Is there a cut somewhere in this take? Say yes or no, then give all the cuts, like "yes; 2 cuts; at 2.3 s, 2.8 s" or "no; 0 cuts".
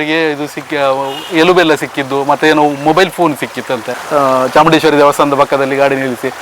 yes; 1 cut; at 3.9 s